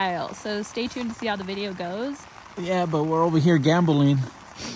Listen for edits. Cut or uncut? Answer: cut